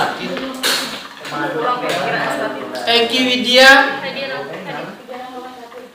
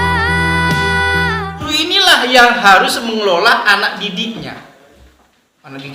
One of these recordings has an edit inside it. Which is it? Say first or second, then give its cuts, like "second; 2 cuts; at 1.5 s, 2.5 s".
second; 1 cut; at 1.6 s